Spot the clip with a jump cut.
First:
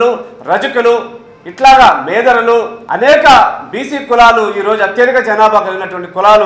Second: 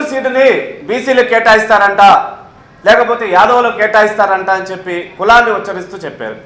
first; 1 cut; at 2.8 s

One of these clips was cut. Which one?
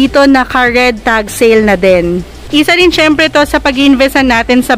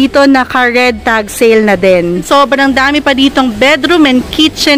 second; 1 cut; at 2.2 s

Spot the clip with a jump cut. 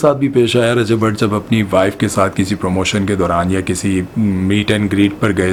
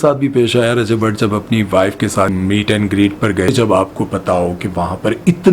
second; 2 cuts; at 2.3 s, 3.5 s

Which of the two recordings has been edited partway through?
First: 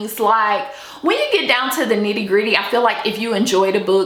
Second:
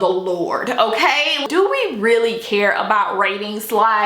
second; 1 cut; at 1.4 s

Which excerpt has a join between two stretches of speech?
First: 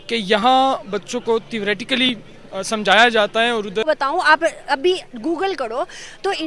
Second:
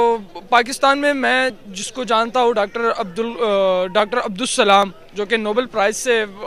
first; 1 cut; at 3.8 s

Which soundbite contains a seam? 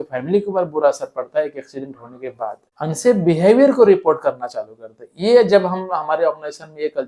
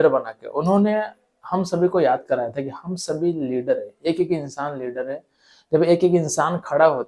first; 1 cut; at 2.7 s

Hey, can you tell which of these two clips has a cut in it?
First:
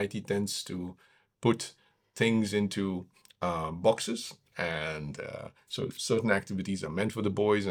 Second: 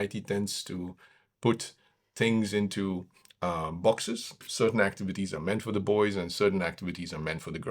second; 1 cut; at 4.5 s

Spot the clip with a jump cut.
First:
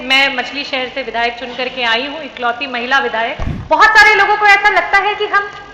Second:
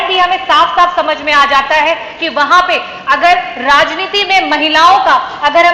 first; 1 cut; at 3.5 s

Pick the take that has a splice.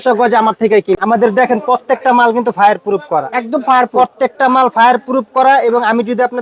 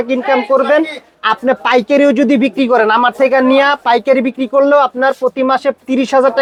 first; 1 cut; at 1.0 s

